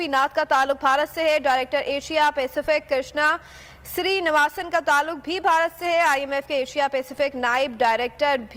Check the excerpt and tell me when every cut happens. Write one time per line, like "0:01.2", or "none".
none